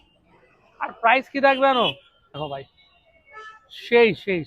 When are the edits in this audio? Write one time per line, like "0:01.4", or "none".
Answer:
0:02.4